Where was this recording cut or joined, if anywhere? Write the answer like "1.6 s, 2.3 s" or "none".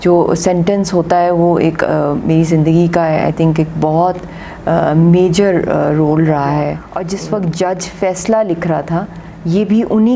6.9 s